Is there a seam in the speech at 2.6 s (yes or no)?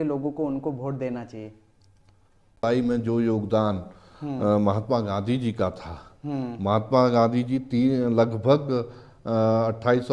yes